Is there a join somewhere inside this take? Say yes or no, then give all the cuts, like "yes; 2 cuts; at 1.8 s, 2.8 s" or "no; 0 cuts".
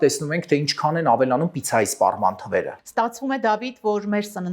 no; 0 cuts